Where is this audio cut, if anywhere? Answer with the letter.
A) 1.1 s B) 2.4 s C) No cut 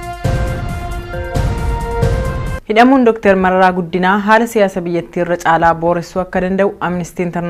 B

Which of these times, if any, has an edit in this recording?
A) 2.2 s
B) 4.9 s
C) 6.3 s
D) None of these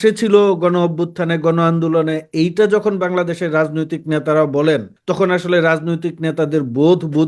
B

